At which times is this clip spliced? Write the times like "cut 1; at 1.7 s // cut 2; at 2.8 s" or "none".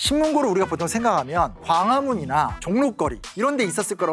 none